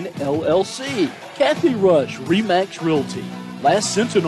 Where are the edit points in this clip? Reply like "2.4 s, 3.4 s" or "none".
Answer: 1.2 s